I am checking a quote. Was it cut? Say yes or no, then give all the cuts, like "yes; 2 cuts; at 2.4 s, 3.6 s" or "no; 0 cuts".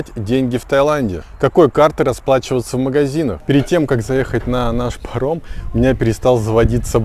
yes; 1 cut; at 3.4 s